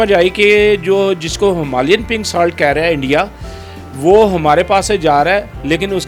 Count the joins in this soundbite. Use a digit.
0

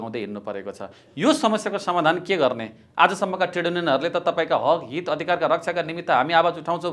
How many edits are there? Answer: 0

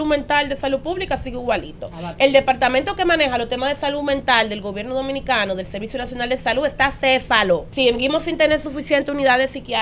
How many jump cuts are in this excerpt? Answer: 2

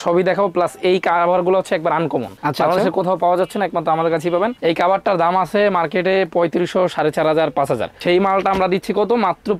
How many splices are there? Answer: 1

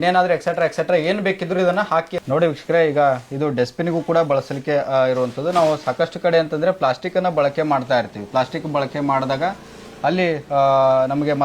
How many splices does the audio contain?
1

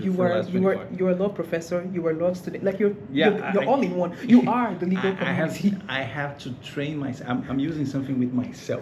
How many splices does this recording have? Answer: 0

